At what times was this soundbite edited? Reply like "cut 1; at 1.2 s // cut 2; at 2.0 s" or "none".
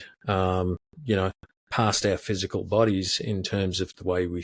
none